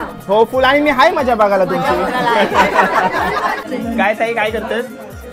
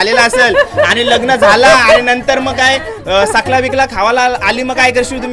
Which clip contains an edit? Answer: first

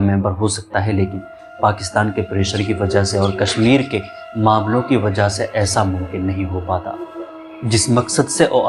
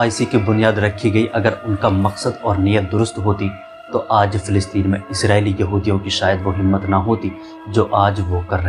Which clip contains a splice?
first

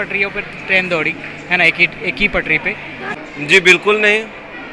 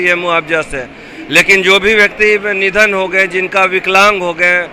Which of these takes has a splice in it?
first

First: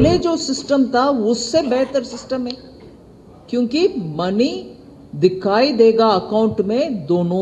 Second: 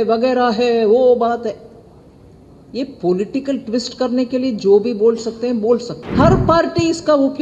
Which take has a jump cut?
second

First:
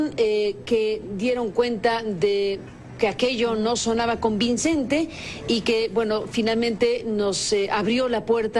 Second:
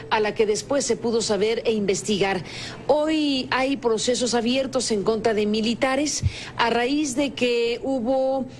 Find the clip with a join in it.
second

